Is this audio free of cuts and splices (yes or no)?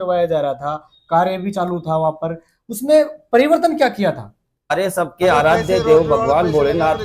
no